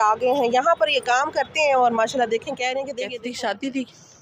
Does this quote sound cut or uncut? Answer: cut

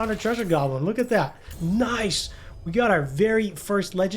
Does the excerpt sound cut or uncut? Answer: cut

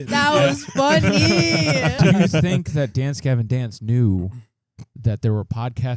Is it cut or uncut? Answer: cut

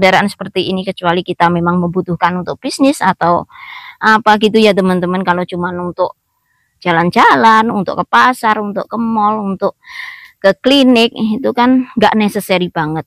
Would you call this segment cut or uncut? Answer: uncut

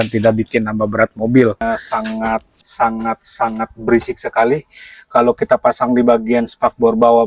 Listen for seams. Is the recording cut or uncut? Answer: cut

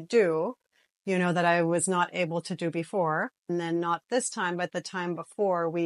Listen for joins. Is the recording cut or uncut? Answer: cut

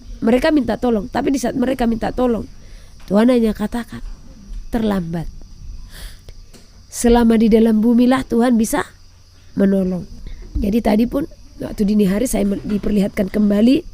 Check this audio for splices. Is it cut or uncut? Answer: cut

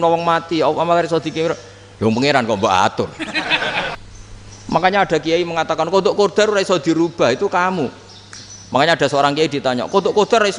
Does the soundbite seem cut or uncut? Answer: cut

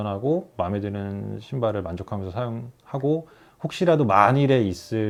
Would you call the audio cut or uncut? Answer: uncut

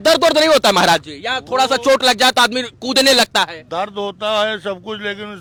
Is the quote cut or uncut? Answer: uncut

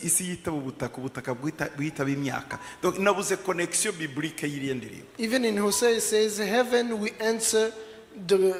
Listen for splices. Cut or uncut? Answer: uncut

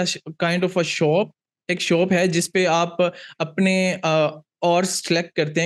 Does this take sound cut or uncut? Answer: uncut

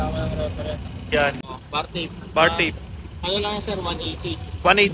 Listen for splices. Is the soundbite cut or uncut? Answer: cut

